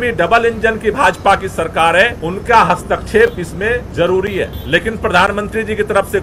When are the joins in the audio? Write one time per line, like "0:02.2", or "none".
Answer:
0:02.2
0:03.9
0:04.6

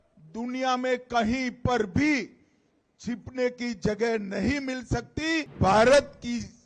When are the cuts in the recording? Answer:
0:05.5

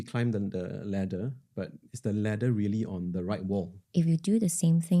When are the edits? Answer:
0:03.8

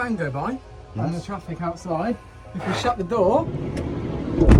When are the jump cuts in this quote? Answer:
none

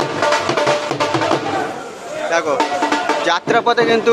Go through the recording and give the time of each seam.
none

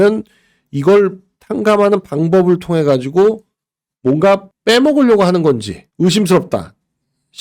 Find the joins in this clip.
none

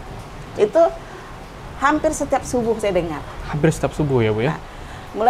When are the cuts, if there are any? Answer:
none

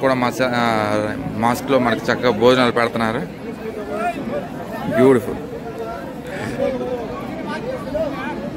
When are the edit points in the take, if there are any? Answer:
none

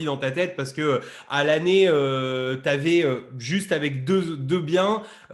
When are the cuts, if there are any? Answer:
none

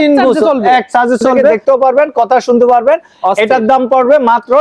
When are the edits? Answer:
0:01.6

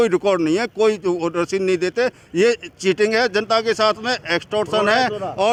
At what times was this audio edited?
none

